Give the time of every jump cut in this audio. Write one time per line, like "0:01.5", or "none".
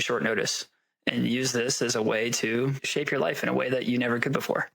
0:02.8